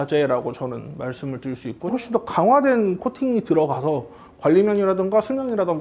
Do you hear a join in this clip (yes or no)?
yes